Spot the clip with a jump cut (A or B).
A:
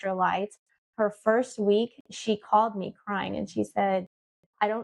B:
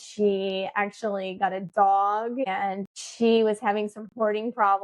B